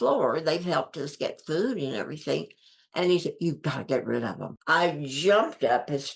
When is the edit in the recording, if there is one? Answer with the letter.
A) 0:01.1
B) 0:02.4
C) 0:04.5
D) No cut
C